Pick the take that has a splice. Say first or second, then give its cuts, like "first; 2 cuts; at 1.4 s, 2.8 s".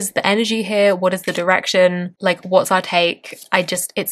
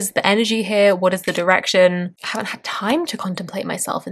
second; 1 cut; at 2.1 s